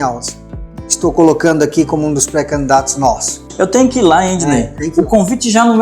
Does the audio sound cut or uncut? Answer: cut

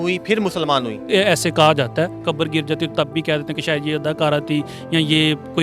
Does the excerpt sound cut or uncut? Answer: cut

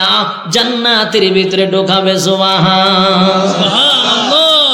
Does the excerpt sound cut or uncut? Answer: uncut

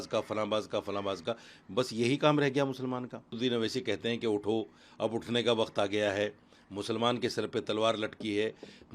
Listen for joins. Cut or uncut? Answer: cut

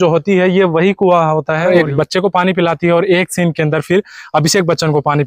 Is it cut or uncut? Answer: cut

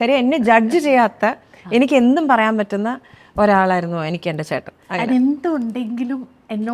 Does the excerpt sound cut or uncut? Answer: uncut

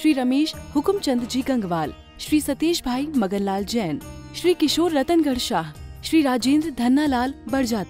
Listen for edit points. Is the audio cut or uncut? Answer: uncut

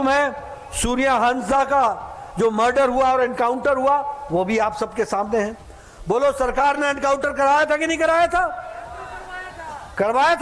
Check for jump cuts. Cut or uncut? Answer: uncut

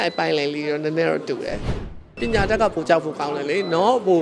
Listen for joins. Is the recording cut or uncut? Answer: cut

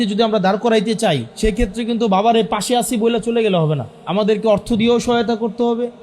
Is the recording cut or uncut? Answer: cut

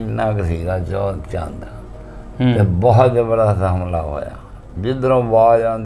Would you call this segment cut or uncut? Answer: uncut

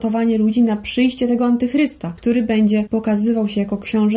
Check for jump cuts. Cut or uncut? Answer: cut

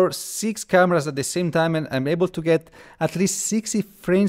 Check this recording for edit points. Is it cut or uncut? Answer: uncut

